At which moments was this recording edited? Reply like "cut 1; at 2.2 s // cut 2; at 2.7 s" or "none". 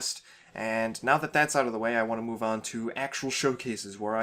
cut 1; at 1.0 s